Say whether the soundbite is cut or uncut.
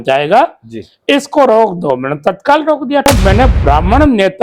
cut